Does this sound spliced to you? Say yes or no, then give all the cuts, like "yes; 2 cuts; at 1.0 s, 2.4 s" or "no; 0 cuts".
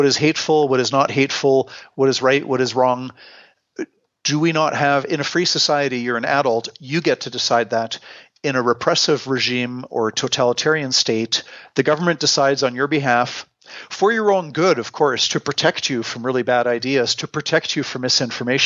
no; 0 cuts